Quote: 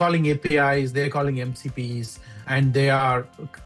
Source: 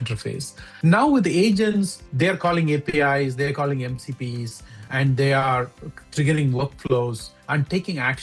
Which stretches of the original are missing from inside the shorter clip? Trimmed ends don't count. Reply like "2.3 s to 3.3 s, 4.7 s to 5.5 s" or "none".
none